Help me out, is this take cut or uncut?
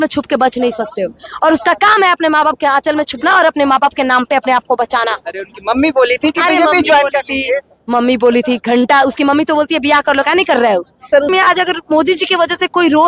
cut